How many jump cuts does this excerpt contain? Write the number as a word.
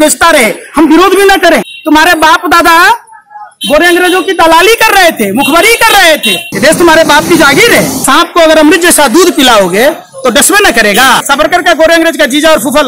four